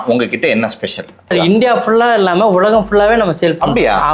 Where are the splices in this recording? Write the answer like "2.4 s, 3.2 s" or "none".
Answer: 1.3 s